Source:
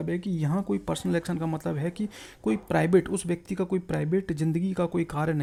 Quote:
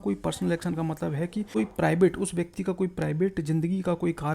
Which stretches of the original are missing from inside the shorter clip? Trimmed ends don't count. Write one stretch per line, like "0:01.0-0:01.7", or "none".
0:02.1-0:02.4